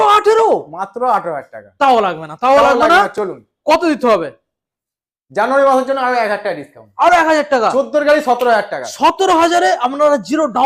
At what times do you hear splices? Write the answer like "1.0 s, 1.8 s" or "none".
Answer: none